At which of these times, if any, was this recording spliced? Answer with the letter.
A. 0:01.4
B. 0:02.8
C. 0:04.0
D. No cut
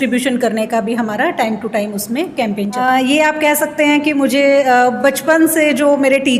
B